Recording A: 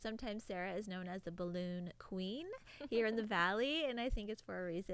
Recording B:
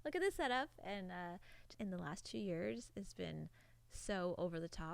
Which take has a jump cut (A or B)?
B